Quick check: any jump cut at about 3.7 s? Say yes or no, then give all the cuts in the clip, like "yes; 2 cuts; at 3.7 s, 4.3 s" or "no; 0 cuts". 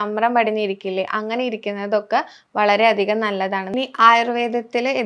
yes; 1 cut; at 3.7 s